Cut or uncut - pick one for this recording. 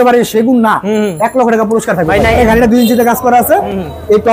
cut